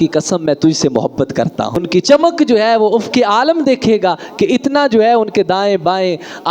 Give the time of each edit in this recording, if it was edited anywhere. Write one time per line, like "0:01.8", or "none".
0:01.8